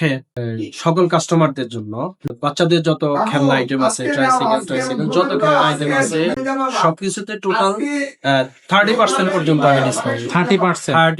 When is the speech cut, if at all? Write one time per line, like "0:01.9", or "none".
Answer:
0:02.3
0:06.4